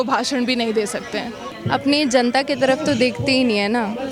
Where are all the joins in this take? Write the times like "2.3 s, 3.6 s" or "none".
1.5 s